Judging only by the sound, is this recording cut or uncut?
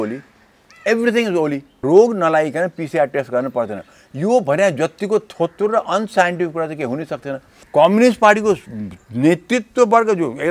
cut